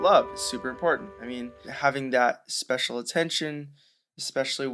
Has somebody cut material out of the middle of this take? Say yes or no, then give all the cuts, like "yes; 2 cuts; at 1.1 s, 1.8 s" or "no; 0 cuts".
yes; 1 cut; at 1.7 s